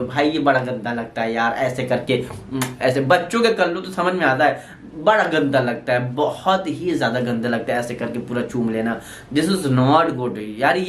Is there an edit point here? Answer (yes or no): no